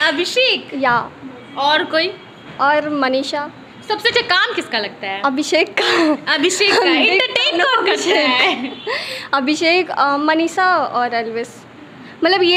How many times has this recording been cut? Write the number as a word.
zero